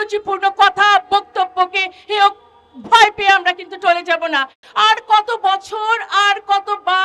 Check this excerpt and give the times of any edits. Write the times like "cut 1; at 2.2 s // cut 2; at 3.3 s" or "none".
cut 1; at 4.6 s